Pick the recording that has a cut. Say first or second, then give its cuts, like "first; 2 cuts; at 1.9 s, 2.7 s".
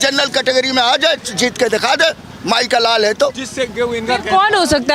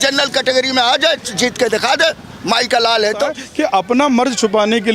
second; 1 cut; at 3.4 s